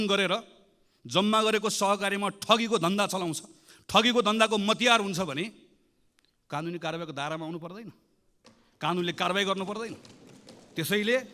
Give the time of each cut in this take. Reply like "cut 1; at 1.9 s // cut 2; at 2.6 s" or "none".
none